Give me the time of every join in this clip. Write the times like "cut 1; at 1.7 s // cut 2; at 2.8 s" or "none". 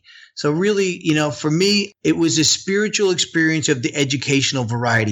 cut 1; at 1.9 s